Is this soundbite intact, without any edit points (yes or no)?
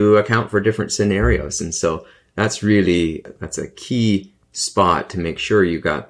no